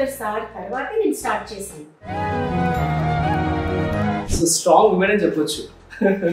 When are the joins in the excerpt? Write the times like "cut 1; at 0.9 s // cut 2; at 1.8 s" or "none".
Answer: cut 1; at 2.0 s // cut 2; at 4.3 s